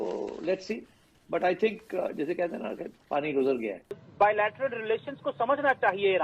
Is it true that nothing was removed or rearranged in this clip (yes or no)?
no